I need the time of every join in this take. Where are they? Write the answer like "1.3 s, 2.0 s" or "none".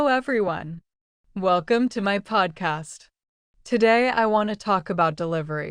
2.1 s